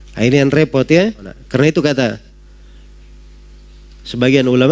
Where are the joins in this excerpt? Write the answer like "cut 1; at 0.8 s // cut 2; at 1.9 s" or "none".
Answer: cut 1; at 1.4 s

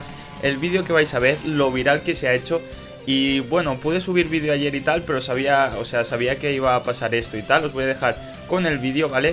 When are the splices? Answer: none

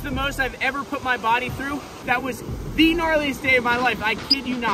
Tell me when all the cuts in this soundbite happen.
cut 1; at 1.9 s

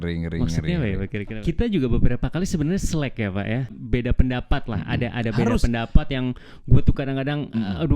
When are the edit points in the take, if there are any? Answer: cut 1; at 1.2 s // cut 2; at 3.8 s

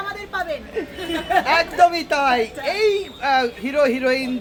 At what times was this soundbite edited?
none

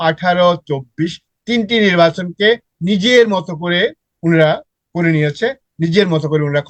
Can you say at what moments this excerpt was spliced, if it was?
none

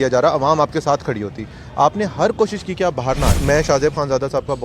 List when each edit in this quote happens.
cut 1; at 3.4 s

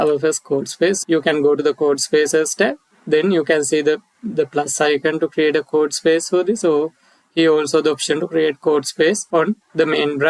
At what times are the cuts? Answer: cut 1; at 1.0 s // cut 2; at 9.2 s

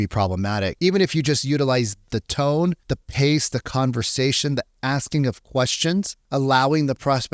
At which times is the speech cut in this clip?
cut 1; at 0.8 s // cut 2; at 2.1 s // cut 3; at 2.9 s // cut 4; at 6.2 s

